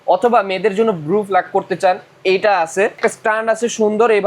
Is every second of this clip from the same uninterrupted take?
no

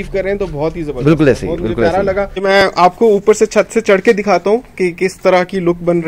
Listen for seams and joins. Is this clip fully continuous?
no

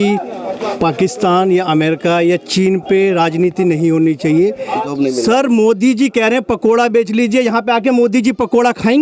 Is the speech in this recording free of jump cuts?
no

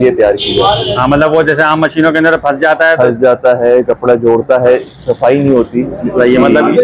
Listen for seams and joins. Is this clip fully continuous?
yes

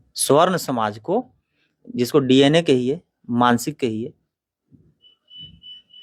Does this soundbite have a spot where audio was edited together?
no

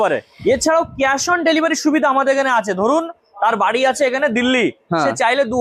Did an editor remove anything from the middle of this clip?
no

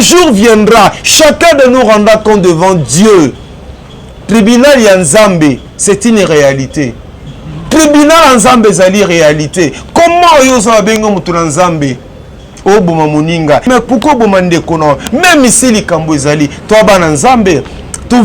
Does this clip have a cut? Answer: yes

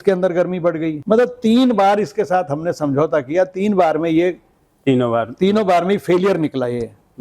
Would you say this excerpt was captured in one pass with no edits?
no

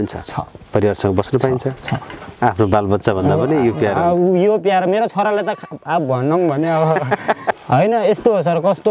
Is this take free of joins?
no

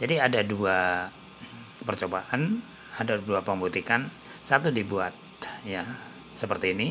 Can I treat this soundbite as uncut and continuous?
yes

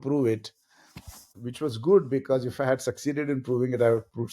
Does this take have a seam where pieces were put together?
yes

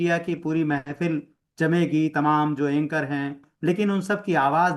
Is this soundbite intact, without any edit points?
no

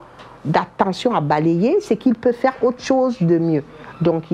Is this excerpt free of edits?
yes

